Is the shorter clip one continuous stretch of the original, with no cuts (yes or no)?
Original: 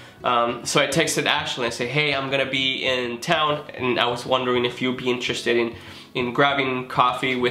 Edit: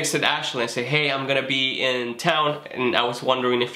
yes